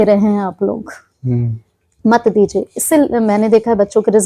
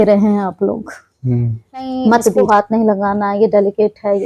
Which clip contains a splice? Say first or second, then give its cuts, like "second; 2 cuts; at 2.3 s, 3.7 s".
second; 1 cut; at 2.4 s